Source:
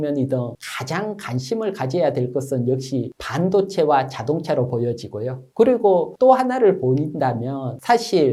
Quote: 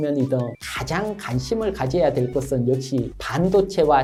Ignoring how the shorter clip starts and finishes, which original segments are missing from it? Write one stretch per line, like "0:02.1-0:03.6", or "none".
none